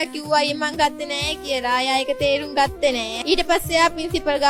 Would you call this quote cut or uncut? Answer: cut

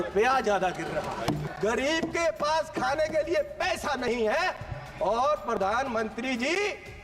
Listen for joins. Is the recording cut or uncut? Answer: cut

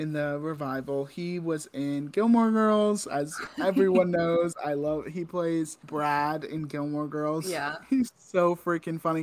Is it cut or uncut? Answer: cut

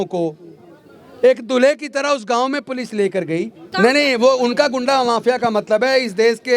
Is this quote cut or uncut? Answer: cut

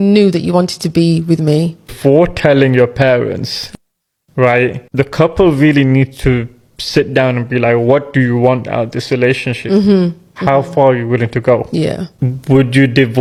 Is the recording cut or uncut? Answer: uncut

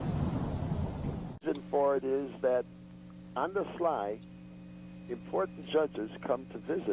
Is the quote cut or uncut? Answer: cut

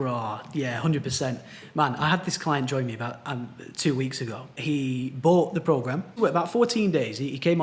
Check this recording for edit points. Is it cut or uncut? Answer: cut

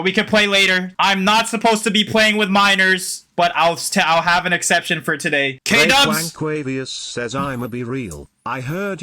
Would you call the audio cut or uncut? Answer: cut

